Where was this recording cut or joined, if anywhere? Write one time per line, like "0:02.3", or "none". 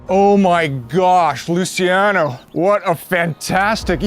0:02.4